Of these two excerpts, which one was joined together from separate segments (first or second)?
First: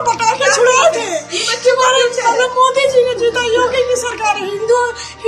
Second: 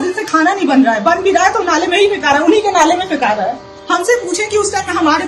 second